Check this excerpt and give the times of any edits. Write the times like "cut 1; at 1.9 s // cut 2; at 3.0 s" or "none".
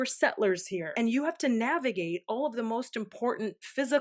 cut 1; at 0.9 s